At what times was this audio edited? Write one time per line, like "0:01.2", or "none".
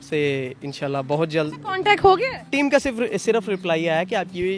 0:02.5